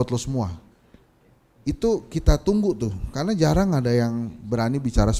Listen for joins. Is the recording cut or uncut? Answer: uncut